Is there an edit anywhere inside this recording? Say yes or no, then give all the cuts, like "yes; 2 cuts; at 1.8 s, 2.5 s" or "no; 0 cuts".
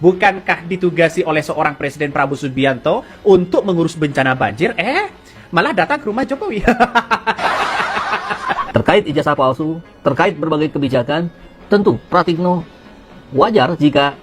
yes; 1 cut; at 8.3 s